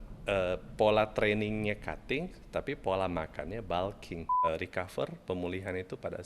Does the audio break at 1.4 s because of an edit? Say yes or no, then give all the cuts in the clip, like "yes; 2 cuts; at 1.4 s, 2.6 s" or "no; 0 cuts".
no; 1 cut; at 4.4 s